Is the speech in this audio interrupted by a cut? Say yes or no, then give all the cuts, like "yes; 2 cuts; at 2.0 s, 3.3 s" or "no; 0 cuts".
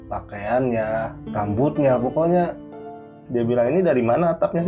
yes; 2 cuts; at 1.2 s, 3.1 s